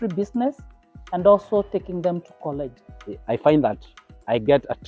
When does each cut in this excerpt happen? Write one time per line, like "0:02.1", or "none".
0:02.9